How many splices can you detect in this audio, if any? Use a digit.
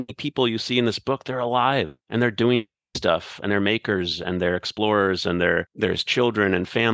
2